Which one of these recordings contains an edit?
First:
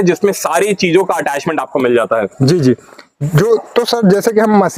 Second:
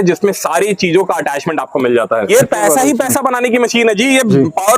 second; 1 cut; at 2.3 s

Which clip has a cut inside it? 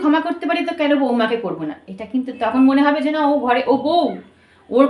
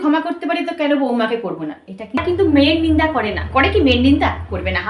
second; 1 cut; at 2.2 s

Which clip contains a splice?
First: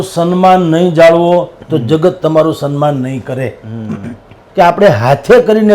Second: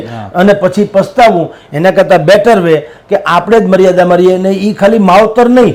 first; 1 cut; at 4.4 s

